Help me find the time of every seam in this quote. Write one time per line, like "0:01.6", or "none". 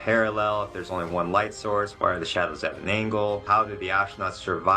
0:01.9
0:03.4